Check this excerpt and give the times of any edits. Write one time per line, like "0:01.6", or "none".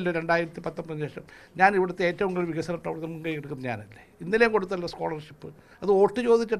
none